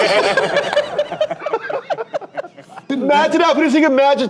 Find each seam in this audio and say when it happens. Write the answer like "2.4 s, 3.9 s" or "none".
2.9 s